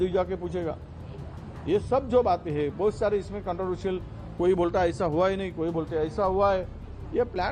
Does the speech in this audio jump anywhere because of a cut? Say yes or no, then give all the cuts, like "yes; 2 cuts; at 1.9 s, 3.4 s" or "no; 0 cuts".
no; 0 cuts